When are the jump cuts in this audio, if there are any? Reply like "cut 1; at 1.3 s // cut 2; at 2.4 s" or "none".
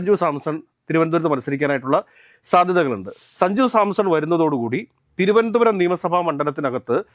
cut 1; at 3.2 s